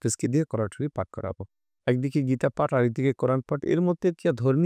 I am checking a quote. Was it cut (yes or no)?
no